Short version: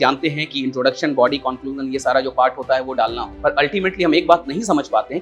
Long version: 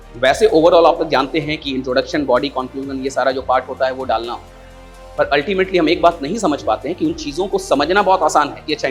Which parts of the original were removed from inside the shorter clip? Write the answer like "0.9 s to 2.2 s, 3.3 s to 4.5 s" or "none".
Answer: 4.4 s to 5.0 s